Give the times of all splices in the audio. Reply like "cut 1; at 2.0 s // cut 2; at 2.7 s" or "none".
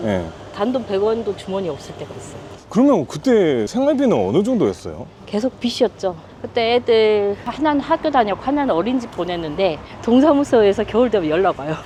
none